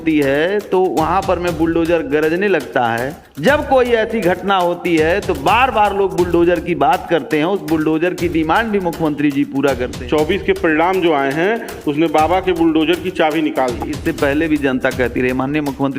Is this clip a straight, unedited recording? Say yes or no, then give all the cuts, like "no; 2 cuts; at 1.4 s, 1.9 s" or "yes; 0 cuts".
no; 2 cuts; at 9.9 s, 13.9 s